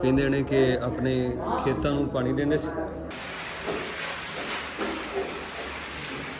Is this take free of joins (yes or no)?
yes